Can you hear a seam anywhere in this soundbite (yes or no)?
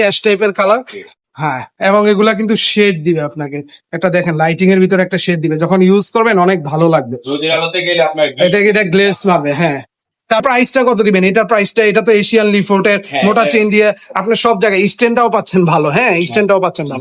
no